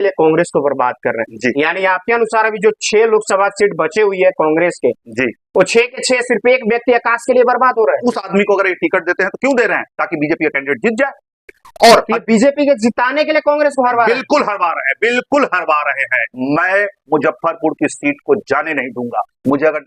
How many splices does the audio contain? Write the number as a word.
two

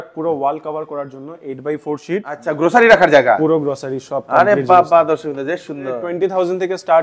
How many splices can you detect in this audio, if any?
two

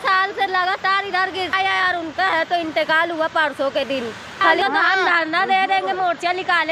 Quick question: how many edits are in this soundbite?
two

